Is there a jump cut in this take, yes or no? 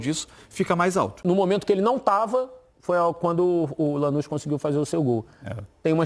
yes